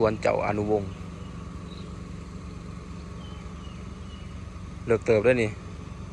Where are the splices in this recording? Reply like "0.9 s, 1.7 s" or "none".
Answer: none